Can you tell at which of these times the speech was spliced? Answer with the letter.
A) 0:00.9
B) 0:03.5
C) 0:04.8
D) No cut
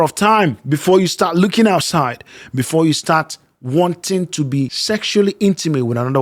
C